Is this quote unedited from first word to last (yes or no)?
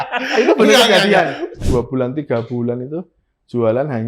no